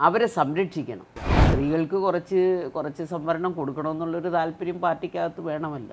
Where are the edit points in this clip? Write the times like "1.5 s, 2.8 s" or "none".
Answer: 1.4 s